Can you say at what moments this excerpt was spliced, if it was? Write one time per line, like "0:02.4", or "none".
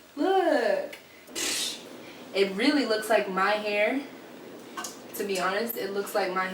0:01.4